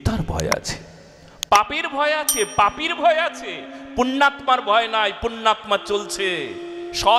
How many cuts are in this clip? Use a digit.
0